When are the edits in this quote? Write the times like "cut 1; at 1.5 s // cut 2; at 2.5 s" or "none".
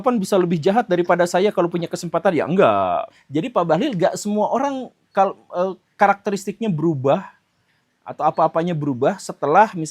cut 1; at 3.2 s